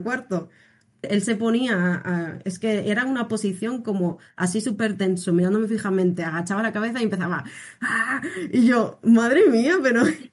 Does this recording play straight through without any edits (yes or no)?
no